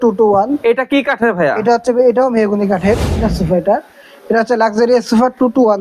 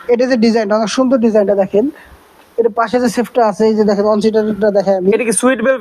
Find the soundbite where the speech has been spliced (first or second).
first